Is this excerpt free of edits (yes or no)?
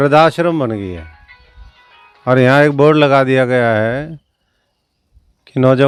yes